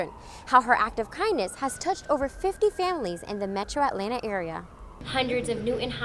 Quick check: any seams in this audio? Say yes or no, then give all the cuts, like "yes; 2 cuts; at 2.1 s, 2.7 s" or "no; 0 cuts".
yes; 1 cut; at 5.0 s